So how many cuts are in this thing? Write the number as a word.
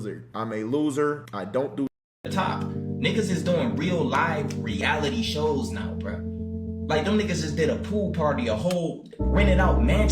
one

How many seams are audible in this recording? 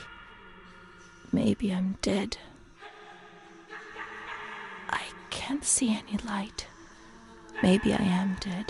zero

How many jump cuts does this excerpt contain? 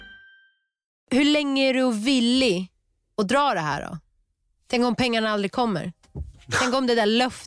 one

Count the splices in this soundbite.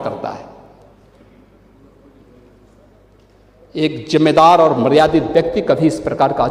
zero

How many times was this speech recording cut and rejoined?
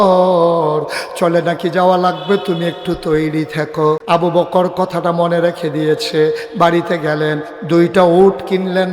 one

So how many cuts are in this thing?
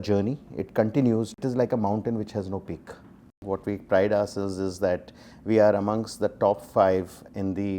two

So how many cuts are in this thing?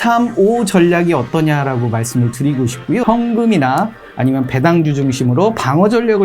one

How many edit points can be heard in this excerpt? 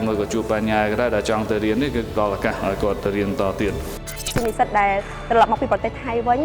one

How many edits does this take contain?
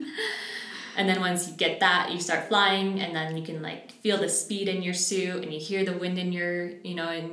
zero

